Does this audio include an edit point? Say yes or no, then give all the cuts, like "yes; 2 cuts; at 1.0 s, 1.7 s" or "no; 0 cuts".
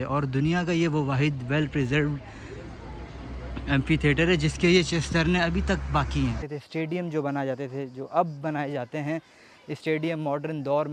yes; 1 cut; at 6.4 s